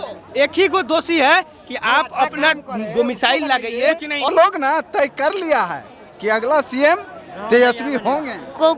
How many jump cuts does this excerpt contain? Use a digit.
1